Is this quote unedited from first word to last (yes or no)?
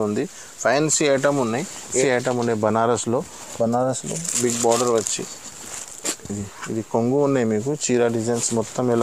no